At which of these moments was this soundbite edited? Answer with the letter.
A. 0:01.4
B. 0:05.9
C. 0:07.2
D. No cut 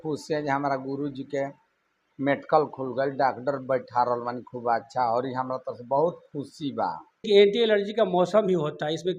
C